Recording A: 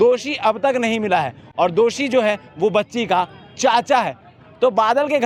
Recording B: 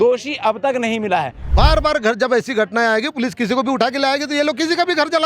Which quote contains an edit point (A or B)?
B